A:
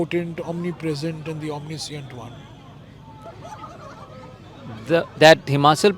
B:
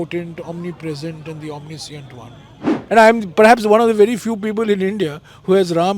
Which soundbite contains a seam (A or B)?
B